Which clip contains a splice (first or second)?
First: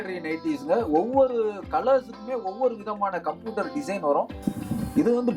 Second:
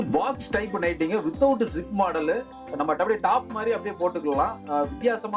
first